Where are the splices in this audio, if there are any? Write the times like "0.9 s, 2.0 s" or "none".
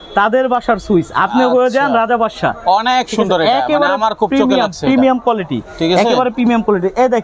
none